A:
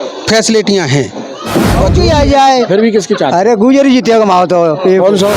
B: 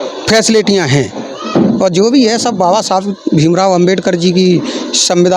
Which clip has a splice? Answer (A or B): A